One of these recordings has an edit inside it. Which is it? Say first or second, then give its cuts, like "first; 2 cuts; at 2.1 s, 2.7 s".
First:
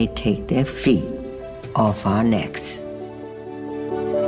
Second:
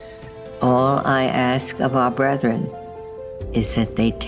first; 1 cut; at 2.5 s